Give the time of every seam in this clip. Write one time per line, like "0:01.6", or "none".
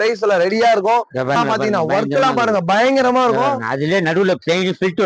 0:01.4